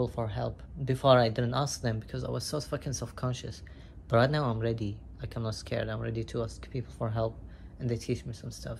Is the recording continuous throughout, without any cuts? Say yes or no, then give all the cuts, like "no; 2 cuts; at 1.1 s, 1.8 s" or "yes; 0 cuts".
yes; 0 cuts